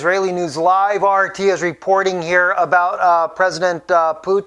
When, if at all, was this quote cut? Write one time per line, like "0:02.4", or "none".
none